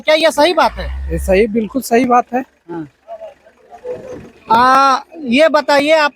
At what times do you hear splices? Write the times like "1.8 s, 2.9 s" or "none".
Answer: none